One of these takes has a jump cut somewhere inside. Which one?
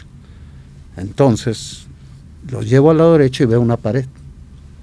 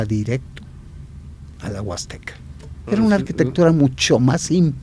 second; 1 cut; at 2.8 s

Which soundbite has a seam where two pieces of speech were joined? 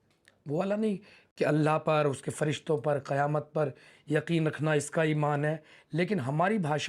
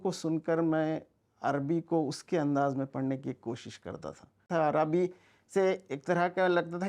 second; 1 cut; at 4.4 s

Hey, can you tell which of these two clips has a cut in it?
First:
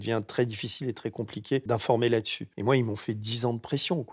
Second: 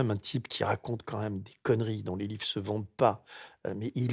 first; 2 cuts; at 1.6 s, 2.4 s

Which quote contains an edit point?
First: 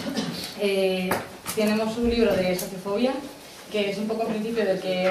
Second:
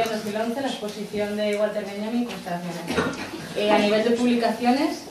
second; 1 cut; at 1.3 s

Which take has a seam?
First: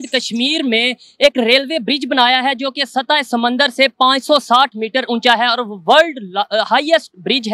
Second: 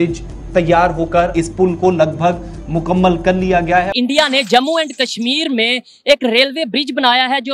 second; 2 cuts; at 1.3 s, 3.9 s

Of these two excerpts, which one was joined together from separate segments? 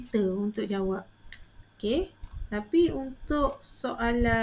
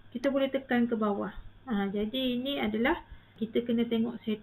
second; 1 cut; at 3.4 s

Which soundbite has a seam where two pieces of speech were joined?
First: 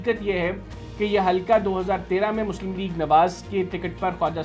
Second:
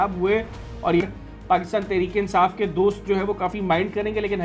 second; 1 cut; at 1.0 s

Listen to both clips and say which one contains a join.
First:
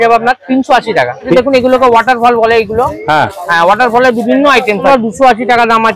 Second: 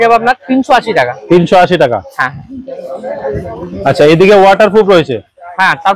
first; 2 cuts; at 1.3 s, 4.9 s

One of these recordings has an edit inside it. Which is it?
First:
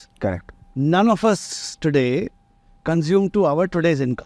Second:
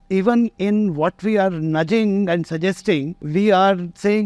second; 1 cut; at 3.2 s

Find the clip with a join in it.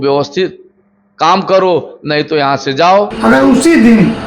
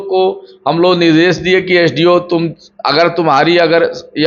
first; 1 cut; at 3.1 s

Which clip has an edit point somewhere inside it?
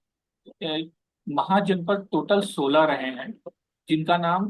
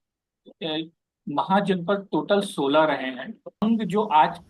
second; 1 cut; at 3.6 s

